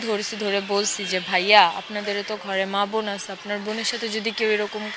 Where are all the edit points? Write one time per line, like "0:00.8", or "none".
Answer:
none